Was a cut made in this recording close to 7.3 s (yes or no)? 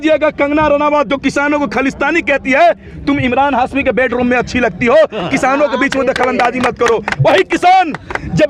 no